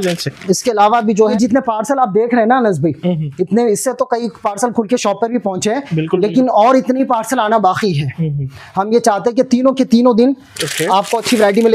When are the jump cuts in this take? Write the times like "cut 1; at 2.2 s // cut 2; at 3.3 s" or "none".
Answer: cut 1; at 1.3 s